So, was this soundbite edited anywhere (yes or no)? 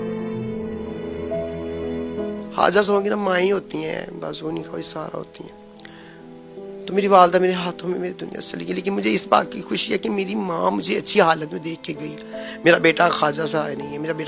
yes